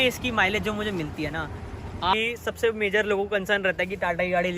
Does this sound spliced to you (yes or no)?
yes